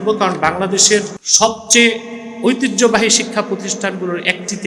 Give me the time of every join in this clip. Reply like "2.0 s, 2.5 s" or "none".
1.2 s